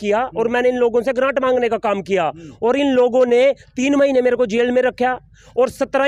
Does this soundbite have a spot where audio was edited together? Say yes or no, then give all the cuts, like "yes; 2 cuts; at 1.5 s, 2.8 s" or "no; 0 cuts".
no; 0 cuts